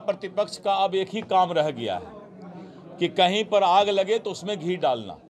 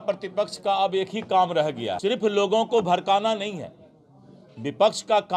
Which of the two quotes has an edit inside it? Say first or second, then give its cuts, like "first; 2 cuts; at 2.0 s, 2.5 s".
second; 1 cut; at 2.0 s